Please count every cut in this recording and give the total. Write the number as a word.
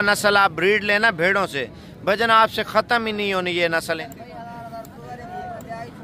one